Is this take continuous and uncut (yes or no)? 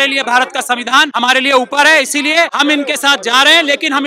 no